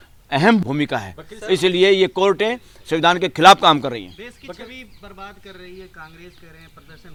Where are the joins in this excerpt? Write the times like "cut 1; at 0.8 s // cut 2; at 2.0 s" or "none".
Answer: none